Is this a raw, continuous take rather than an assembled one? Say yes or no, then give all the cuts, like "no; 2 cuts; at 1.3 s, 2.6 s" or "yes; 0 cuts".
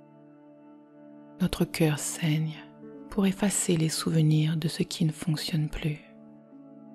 no; 2 cuts; at 1.4 s, 6.0 s